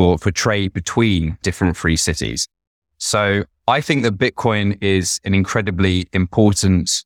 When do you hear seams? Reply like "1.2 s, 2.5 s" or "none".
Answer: 1.4 s

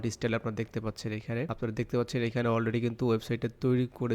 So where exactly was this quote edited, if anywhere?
1.5 s

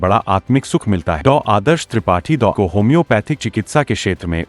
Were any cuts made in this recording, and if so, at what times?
1.2 s, 2.5 s

